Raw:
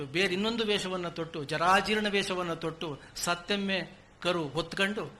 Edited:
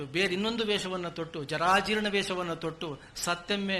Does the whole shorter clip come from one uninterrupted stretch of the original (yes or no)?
yes